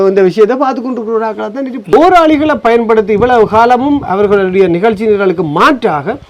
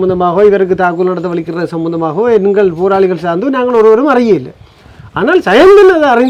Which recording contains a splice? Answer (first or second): first